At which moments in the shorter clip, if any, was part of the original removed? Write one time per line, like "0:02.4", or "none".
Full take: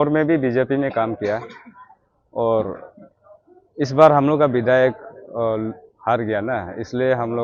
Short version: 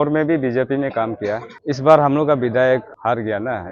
0:01.5
0:02.9